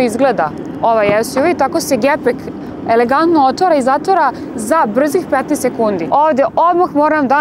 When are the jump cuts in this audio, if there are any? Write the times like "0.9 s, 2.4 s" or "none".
6.0 s